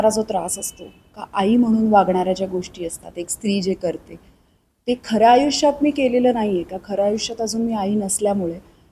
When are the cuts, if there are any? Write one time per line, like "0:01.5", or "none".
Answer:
none